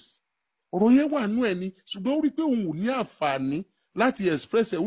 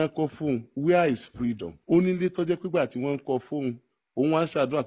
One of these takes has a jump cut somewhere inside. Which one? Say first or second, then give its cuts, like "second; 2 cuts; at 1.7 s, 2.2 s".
second; 1 cut; at 1.7 s